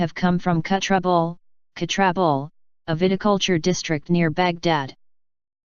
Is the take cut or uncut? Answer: uncut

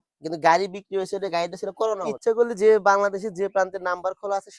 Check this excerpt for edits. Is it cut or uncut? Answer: cut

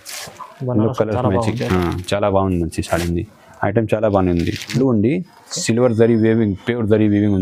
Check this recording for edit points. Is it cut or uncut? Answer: cut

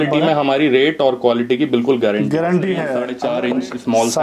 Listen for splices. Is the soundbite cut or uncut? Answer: cut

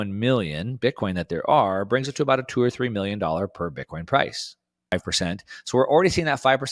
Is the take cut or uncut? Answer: cut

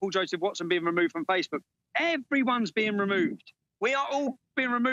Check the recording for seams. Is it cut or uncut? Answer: uncut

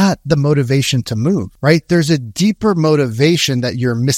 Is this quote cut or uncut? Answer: cut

